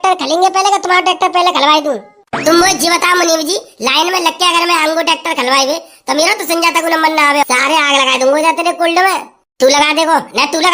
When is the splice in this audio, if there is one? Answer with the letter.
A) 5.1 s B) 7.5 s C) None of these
B